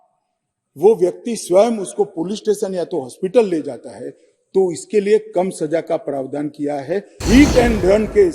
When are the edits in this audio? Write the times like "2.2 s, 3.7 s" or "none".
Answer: 7.2 s